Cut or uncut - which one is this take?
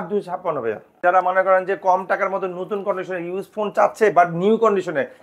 cut